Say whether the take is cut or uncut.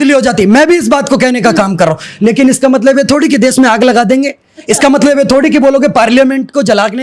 uncut